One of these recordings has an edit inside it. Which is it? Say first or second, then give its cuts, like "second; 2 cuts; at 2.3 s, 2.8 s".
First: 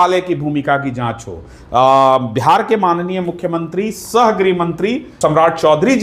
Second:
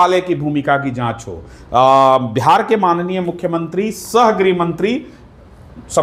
first; 1 cut; at 5.1 s